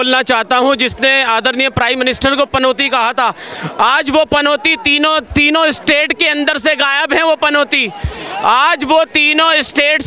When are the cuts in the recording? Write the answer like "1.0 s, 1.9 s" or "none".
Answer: none